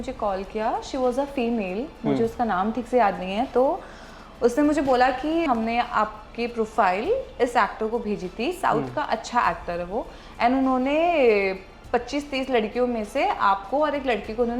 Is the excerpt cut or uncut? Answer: cut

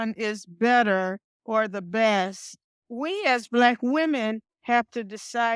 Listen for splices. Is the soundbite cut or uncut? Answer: cut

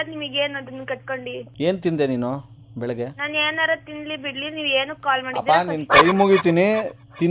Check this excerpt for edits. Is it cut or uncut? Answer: cut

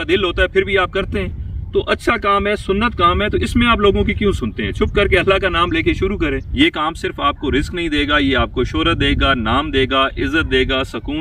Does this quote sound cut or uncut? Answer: cut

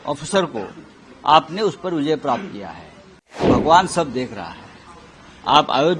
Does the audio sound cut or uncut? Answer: cut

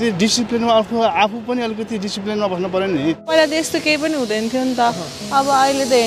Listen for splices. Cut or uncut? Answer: cut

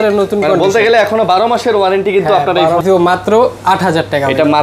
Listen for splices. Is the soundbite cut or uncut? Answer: cut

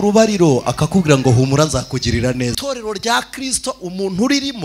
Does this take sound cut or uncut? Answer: cut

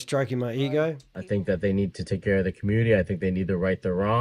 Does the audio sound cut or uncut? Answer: cut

